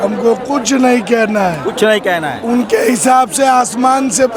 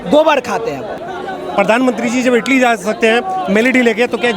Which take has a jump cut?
second; 1 cut; at 1.1 s

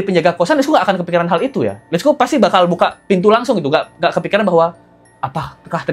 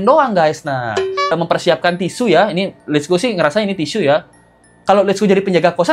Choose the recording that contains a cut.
second; 2 cuts; at 1.3 s, 4.3 s

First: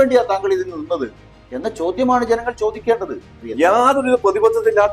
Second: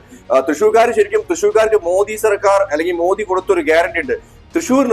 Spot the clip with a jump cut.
first; 1 cut; at 3.4 s

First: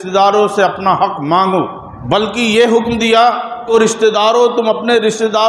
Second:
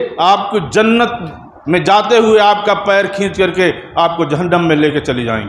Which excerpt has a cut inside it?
first; 2 cuts; at 2.1 s, 3.7 s

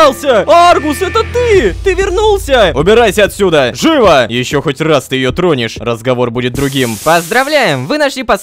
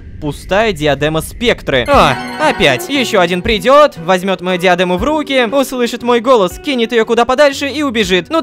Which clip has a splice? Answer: first; 3 cuts; at 2.7 s, 4.3 s, 7.0 s

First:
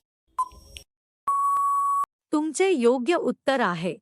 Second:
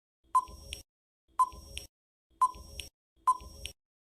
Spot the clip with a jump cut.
first; 2 cuts; at 2.0 s, 3.1 s

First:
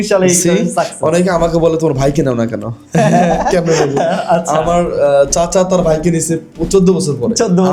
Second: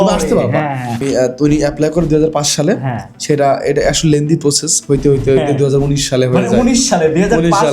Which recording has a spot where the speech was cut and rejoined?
second; 1 cut; at 1.0 s

